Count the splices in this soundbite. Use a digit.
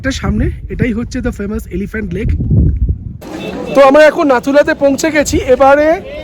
1